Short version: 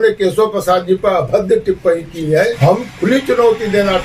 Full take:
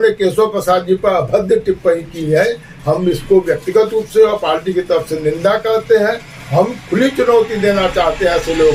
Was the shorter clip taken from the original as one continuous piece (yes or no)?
no